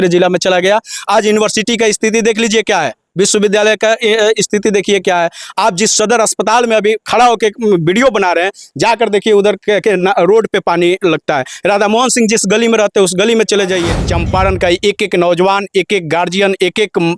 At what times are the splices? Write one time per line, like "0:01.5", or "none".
0:13.9